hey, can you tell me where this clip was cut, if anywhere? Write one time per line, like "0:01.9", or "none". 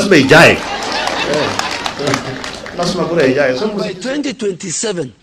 0:03.9